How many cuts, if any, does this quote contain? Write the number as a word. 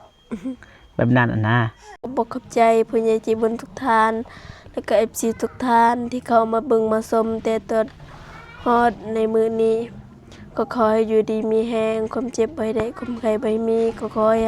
one